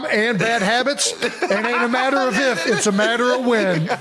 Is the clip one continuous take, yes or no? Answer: yes